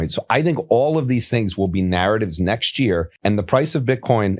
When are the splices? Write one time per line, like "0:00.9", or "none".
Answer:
0:03.1